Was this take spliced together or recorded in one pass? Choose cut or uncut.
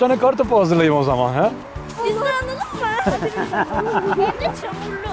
uncut